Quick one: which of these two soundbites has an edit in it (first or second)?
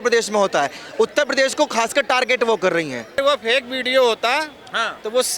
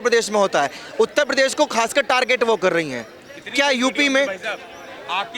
first